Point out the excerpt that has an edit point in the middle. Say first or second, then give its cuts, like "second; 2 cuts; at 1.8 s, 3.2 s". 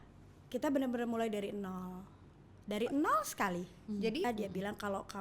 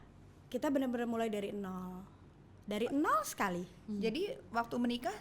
first; 1 cut; at 4.2 s